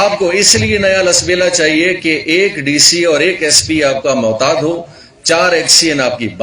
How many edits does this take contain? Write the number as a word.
zero